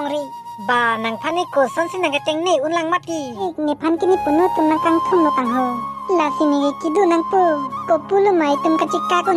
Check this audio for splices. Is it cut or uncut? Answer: cut